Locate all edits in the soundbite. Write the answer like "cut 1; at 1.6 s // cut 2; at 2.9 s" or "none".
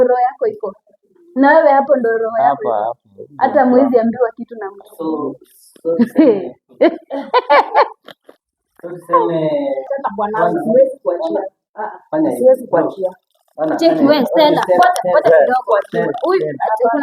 cut 1; at 9.9 s